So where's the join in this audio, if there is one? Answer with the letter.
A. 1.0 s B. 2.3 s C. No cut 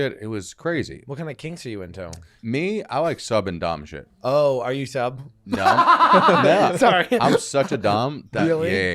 B